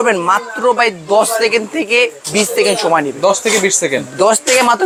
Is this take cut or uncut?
uncut